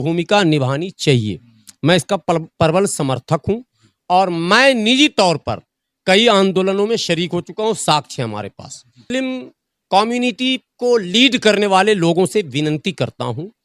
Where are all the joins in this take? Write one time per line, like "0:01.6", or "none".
0:09.0